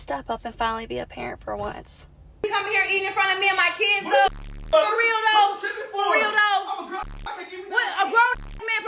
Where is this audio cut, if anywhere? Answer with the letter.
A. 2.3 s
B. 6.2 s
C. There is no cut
A